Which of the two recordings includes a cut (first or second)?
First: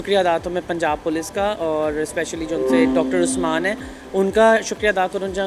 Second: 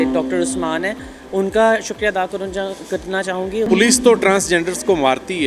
second